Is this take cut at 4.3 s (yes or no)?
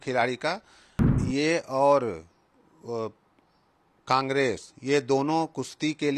no